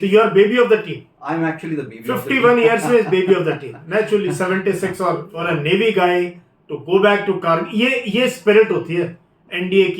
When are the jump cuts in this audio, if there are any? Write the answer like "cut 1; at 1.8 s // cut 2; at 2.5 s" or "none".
cut 1; at 5.3 s